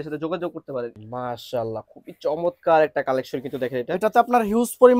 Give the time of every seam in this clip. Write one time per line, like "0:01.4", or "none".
0:01.0